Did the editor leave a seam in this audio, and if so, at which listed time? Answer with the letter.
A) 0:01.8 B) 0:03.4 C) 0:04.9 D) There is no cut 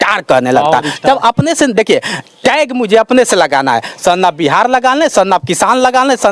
D